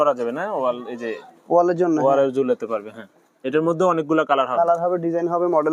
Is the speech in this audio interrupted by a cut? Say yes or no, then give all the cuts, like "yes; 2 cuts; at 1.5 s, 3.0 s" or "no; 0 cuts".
no; 0 cuts